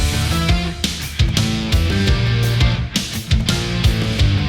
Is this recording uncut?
yes; 0 cuts

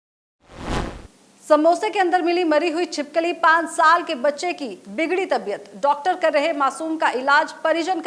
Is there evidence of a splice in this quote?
yes; 1 cut; at 0.9 s

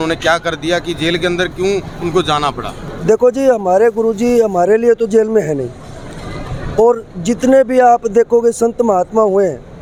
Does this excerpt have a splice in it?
no; 0 cuts

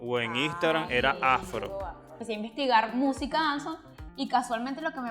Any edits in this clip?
yes; 1 cut; at 2.1 s

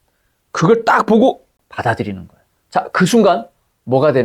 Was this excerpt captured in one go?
no; 1 cut; at 1.6 s

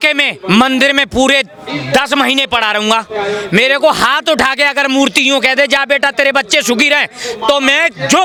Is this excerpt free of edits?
yes; 0 cuts

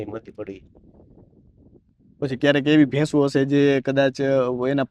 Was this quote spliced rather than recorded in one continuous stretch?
no; 0 cuts

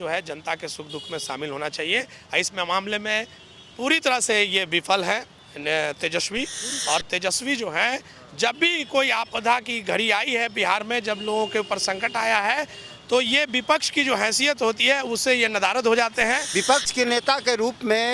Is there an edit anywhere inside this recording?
yes; 1 cut; at 16.4 s

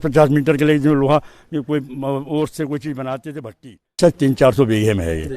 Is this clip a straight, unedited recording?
no; 1 cut; at 4.0 s

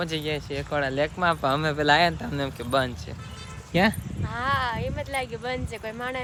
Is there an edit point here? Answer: no; 0 cuts

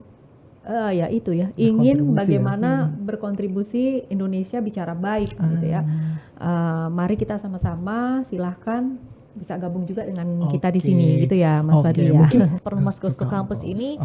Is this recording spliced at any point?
yes; 1 cut; at 12.6 s

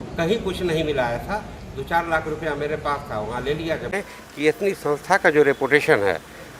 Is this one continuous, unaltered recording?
no; 1 cut; at 4.0 s

